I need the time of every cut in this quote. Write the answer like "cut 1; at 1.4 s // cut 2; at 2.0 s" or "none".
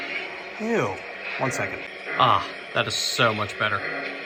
none